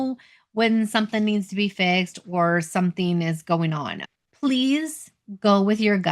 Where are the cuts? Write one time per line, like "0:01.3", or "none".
0:04.0